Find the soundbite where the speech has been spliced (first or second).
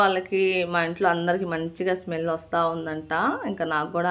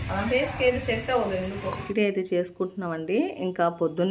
second